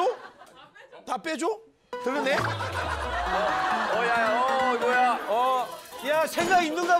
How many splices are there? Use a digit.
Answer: 0